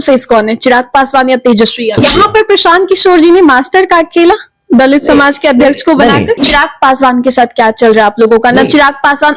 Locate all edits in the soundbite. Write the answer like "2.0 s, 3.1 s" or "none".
1.9 s, 6.4 s